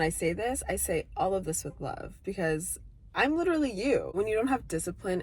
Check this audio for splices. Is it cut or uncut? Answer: cut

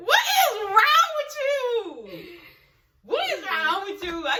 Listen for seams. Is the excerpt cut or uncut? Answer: uncut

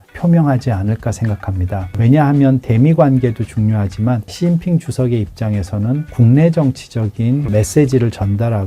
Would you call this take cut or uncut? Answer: cut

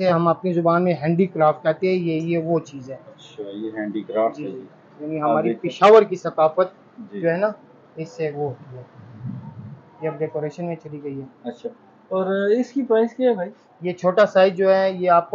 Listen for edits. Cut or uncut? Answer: uncut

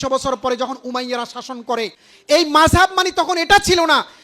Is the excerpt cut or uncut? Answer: cut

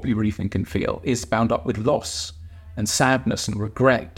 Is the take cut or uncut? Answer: uncut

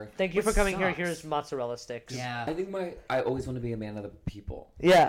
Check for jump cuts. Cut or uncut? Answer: cut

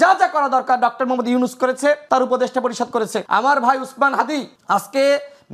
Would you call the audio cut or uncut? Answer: cut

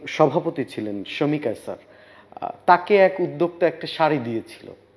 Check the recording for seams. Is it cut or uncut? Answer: uncut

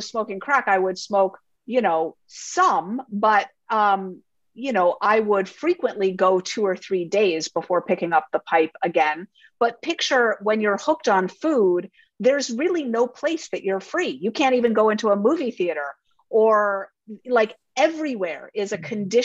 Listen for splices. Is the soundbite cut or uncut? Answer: uncut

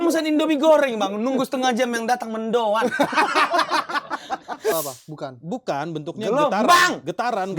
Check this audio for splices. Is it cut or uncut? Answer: cut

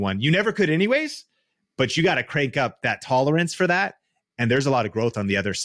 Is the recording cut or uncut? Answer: uncut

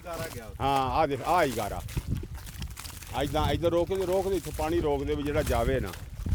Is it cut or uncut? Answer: uncut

